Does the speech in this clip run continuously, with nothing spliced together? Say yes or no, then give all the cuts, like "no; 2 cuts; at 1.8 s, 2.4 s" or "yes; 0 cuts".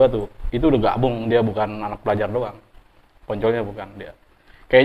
yes; 0 cuts